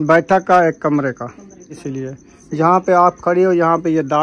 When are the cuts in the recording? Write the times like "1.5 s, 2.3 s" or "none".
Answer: 1.7 s